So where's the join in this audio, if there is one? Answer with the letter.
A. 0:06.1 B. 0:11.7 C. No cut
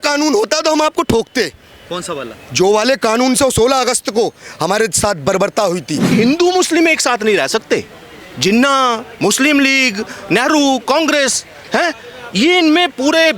A